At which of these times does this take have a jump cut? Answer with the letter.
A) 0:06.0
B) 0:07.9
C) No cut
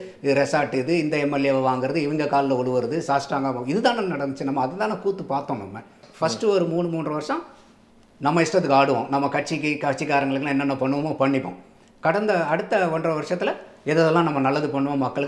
A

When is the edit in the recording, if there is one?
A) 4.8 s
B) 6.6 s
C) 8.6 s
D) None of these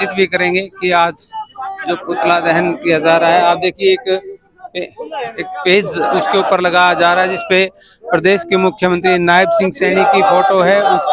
D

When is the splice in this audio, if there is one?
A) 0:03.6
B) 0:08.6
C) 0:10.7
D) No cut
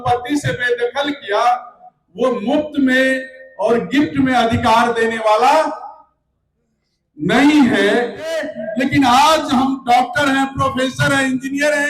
B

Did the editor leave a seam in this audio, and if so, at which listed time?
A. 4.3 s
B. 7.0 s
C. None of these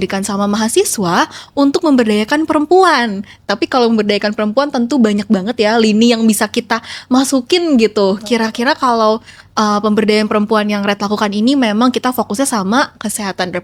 C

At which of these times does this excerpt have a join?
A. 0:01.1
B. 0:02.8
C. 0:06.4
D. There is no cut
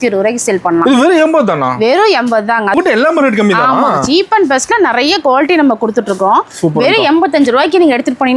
B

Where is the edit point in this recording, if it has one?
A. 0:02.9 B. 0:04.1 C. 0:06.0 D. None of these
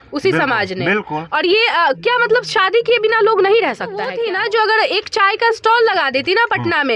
B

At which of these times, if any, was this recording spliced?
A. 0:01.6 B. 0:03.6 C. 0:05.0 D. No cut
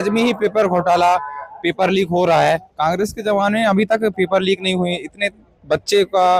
D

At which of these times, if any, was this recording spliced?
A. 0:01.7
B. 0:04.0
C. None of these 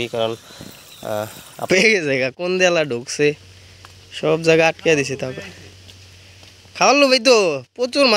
A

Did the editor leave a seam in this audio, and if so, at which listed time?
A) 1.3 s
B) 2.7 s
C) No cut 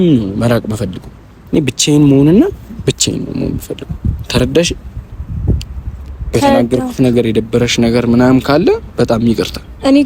A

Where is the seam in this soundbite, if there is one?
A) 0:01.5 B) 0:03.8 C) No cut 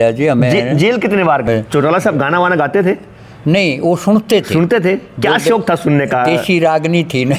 A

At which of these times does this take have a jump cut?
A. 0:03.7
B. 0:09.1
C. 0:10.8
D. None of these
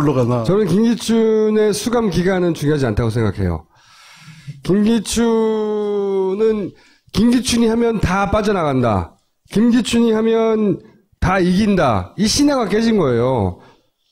A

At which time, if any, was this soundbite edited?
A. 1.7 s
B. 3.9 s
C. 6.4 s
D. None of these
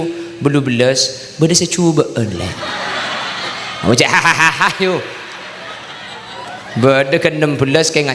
C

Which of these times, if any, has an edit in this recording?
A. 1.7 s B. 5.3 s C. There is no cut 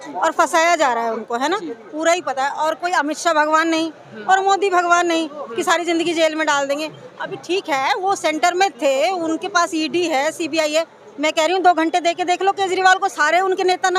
C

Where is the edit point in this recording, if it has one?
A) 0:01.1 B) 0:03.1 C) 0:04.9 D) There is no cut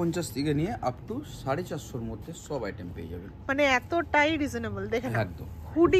D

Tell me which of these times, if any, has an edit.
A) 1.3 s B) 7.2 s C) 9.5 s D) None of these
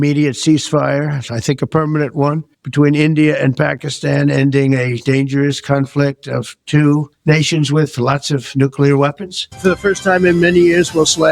C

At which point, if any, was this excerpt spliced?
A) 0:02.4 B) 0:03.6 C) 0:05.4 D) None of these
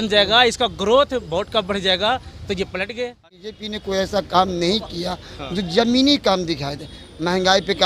B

